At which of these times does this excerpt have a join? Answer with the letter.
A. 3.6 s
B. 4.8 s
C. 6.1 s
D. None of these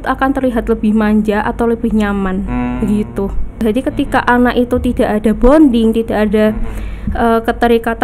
A